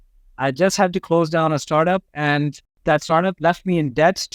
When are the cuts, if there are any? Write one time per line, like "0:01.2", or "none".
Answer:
0:02.7